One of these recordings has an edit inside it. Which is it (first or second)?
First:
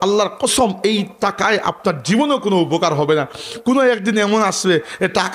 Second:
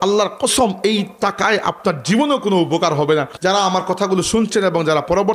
second